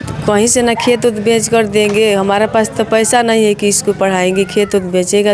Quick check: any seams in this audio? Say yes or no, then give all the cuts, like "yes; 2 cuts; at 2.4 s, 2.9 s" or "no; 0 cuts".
no; 0 cuts